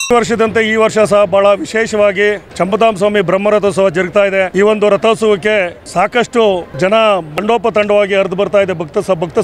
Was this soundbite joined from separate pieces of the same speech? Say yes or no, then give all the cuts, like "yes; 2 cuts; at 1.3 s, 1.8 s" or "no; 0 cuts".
yes; 5 cuts; at 2.5 s, 4.5 s, 5.8 s, 6.7 s, 7.4 s